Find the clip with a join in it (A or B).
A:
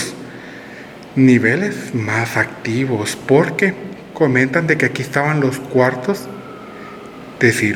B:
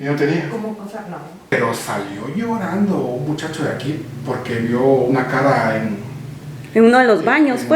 B